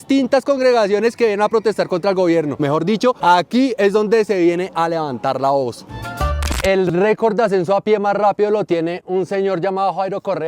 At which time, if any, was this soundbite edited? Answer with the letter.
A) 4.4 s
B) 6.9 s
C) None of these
B